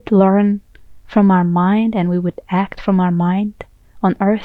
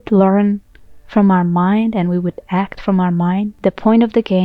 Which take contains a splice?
second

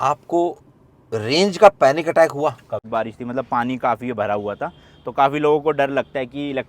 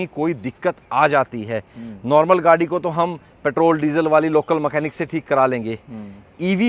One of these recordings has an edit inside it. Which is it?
first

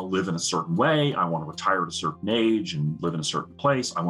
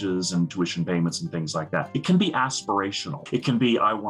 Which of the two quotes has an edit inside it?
second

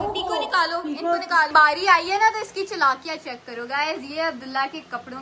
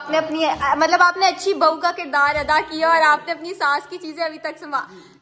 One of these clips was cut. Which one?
first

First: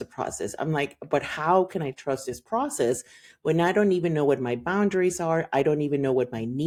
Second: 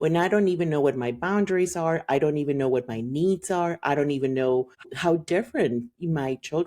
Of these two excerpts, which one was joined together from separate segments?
second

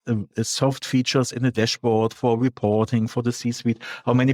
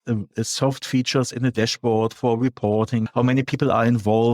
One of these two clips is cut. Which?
second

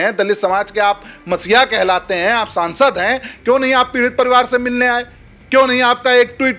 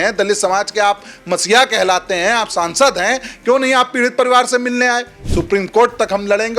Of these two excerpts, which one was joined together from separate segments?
second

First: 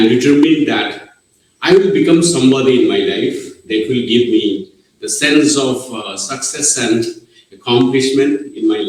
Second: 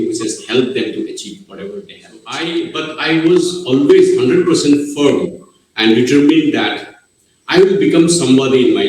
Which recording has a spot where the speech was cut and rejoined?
second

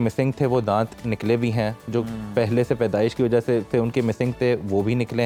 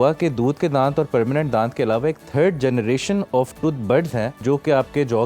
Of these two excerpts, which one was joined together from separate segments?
second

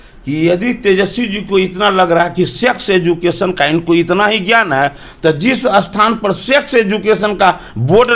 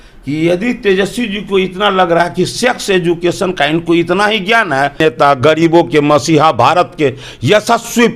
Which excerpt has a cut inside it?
second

